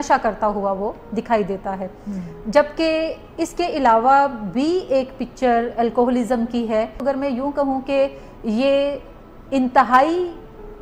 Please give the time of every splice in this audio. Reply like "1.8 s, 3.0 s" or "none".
7.0 s